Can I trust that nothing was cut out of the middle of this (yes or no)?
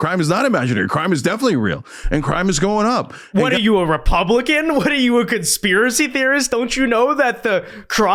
yes